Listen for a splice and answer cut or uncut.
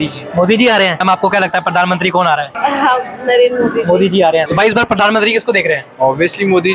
cut